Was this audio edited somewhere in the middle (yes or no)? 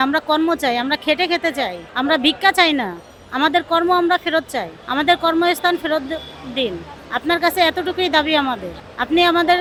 no